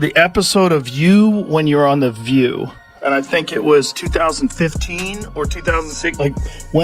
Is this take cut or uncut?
uncut